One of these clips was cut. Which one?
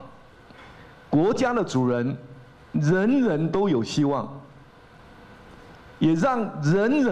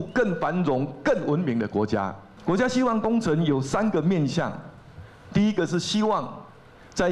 second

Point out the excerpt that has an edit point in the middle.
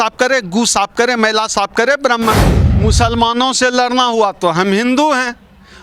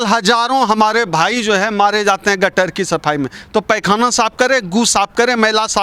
first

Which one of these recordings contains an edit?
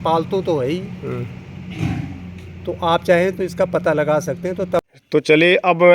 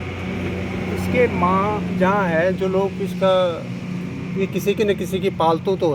first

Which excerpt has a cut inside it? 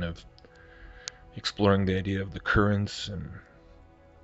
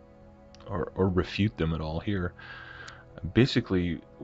first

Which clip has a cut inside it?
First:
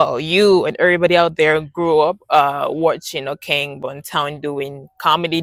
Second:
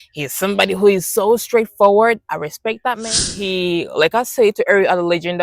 second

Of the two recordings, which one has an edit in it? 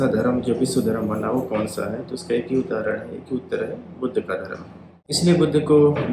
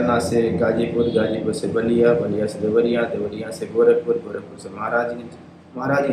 first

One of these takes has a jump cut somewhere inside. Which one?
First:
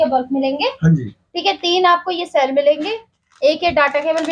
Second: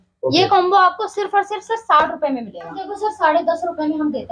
second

